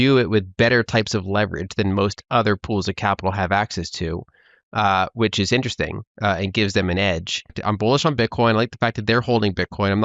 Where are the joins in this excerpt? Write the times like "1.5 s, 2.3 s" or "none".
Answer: 7.6 s